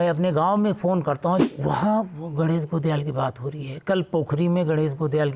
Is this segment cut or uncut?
cut